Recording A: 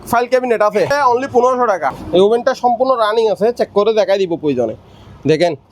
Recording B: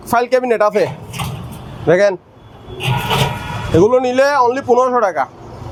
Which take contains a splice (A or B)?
A